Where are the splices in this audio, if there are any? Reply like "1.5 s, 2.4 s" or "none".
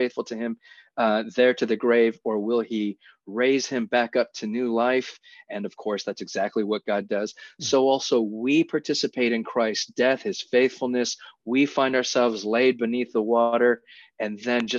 none